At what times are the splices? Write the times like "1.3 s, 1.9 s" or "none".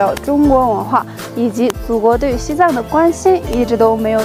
none

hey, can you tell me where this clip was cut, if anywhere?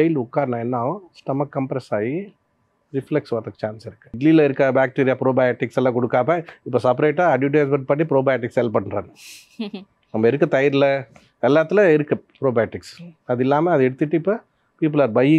4.2 s

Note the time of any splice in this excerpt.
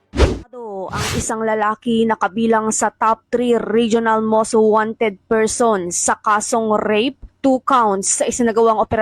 0.9 s

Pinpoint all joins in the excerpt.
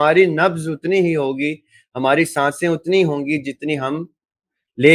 none

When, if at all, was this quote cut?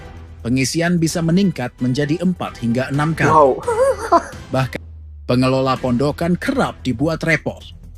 4.7 s

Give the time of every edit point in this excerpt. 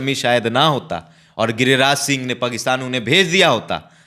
none

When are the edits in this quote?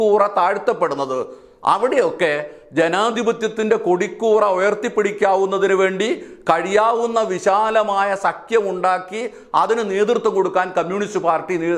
none

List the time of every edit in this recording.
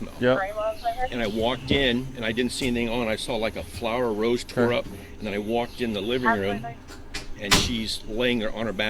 none

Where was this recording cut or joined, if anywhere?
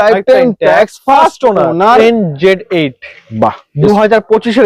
2.0 s

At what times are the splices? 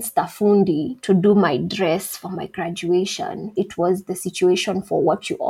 3.4 s

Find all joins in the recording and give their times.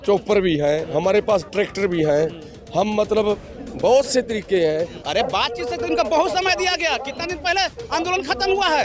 5.0 s

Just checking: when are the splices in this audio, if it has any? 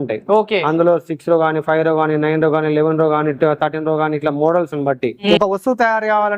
5.3 s

